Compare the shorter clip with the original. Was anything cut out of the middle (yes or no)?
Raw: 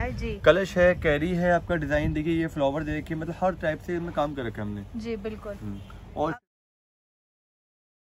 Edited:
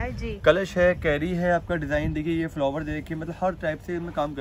no